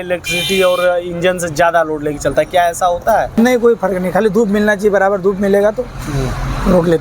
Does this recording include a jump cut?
yes; 1 cut; at 3.3 s

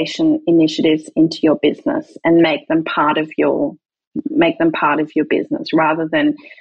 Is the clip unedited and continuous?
yes; 0 cuts

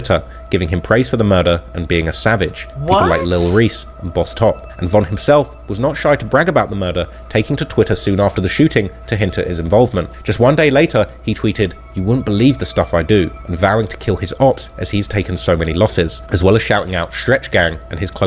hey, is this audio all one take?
yes; 0 cuts

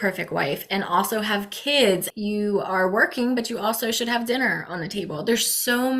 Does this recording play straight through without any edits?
no; 1 cut; at 2.1 s

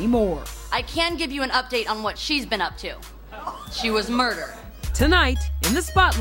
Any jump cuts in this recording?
no; 0 cuts

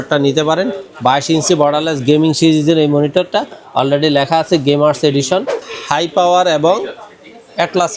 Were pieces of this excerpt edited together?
yes; 1 cut; at 5.6 s

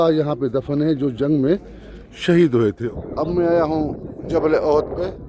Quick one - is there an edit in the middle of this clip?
yes; 1 cut; at 2.8 s

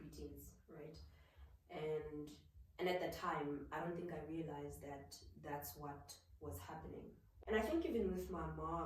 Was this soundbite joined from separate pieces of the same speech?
yes; 1 cut; at 7.3 s

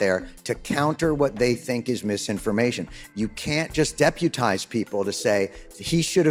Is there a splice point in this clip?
no; 0 cuts

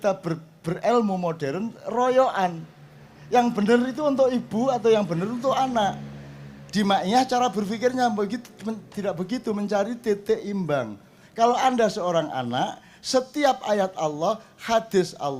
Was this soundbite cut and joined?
no; 0 cuts

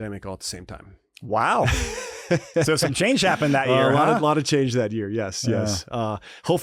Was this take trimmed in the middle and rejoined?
no; 0 cuts

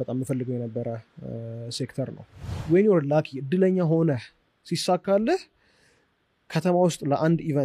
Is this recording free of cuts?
no; 1 cut; at 2.5 s

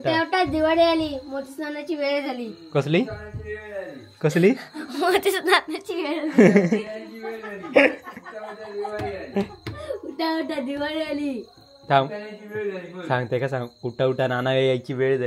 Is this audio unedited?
yes; 0 cuts

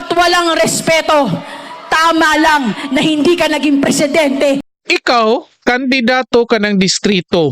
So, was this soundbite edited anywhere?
yes; 1 cut; at 4.6 s

